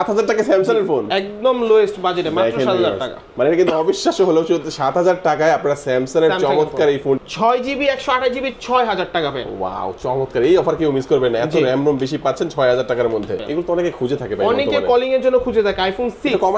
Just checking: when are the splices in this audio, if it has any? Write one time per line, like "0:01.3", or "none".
0:07.2
0:13.4